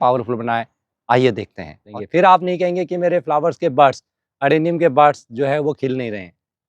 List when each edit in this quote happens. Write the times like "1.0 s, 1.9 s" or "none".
1.9 s